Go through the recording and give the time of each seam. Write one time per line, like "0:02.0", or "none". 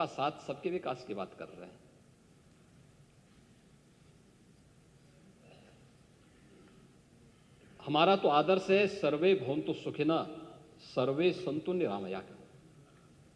none

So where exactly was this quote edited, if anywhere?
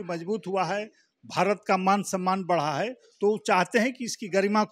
none

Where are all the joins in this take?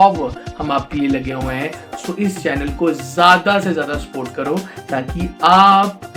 none

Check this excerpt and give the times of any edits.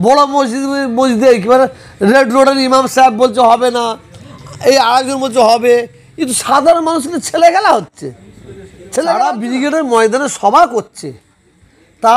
0:09.4

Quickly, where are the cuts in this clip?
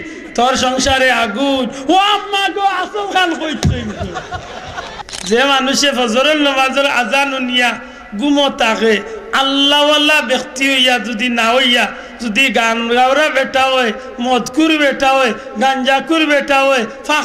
0:05.0

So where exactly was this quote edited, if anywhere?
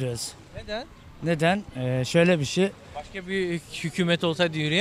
none

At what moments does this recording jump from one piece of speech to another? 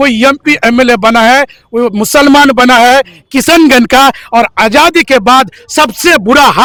none

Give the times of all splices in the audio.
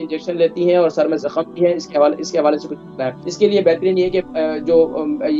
0:03.2

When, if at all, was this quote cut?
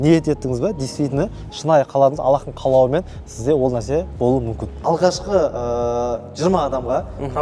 0:04.7

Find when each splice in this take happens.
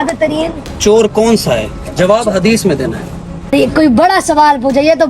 0:03.5

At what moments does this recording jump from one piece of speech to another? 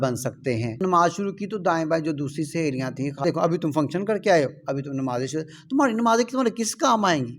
0:00.8
0:03.2

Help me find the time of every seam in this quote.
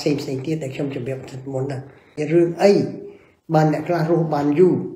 0:02.1

